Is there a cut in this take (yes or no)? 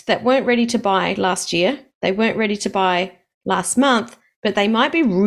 no